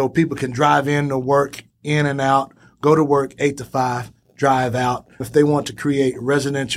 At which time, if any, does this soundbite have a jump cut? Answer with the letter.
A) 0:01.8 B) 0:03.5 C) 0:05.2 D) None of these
C